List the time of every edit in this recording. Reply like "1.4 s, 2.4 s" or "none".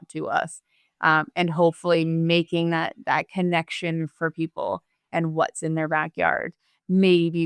none